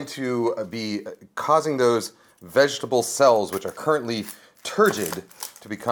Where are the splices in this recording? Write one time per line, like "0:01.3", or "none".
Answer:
none